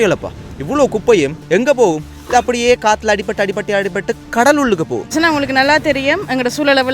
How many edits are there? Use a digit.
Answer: 1